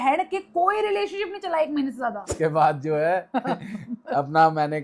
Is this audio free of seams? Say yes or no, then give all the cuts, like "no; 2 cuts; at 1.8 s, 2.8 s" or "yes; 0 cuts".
no; 1 cut; at 2.3 s